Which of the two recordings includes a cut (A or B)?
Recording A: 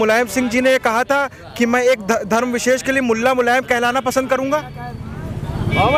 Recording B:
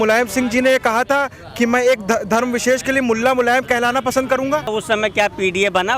B